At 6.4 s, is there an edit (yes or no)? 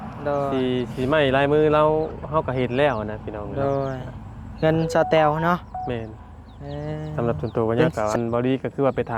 no